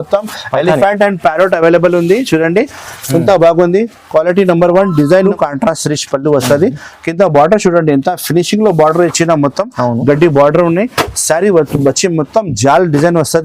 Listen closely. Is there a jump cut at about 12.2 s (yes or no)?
no